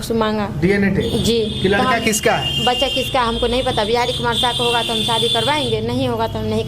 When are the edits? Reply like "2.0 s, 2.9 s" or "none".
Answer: none